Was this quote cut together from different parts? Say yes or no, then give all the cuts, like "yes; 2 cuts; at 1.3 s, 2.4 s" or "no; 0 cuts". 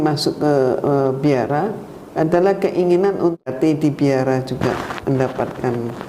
yes; 1 cut; at 3.5 s